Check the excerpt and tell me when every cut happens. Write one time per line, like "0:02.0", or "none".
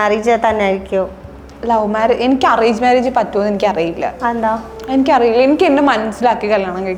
none